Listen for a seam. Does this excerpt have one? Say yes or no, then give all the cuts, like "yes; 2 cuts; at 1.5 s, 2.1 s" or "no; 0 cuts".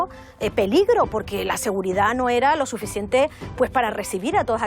no; 0 cuts